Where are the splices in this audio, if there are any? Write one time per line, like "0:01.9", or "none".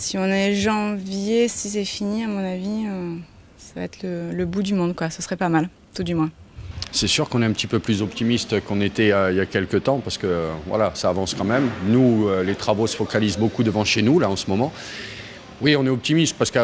none